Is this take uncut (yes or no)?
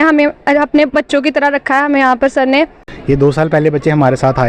no